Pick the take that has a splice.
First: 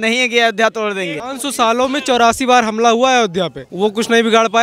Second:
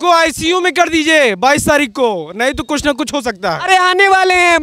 first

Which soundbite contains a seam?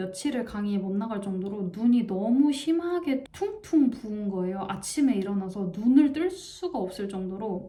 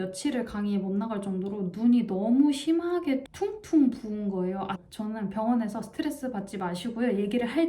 second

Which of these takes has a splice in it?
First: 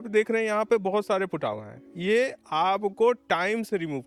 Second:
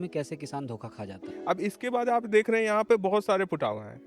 second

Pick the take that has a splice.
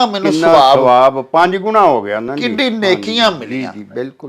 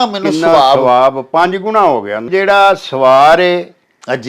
second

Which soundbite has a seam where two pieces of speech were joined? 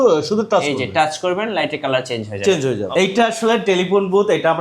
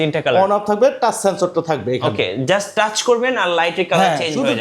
first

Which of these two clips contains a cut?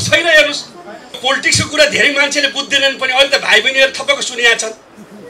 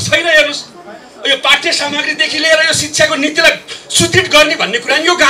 first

